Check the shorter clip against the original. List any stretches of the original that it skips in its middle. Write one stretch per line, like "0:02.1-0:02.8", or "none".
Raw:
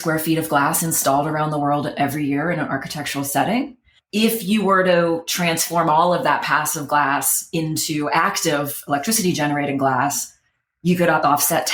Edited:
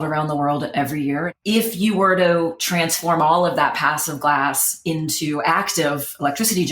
0:02.5-0:04.0